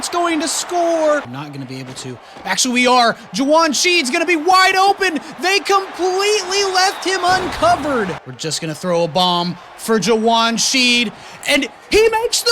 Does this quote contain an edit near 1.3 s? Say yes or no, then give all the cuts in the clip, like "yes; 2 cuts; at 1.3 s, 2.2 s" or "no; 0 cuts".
yes; 2 cuts; at 1.3 s, 8.3 s